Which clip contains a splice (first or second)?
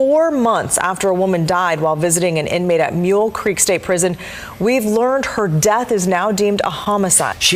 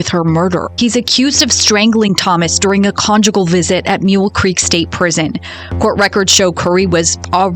second